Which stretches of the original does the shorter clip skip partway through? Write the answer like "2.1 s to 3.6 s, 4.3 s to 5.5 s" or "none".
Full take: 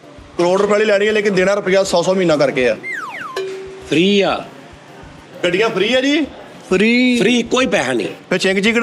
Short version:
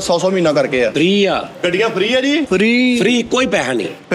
2.8 s to 3.9 s, 4.5 s to 5.3 s, 6.3 s to 6.7 s